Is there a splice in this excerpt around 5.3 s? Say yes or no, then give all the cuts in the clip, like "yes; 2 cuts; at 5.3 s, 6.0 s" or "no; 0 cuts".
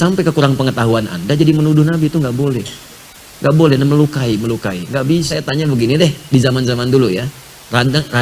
yes; 1 cut; at 5.3 s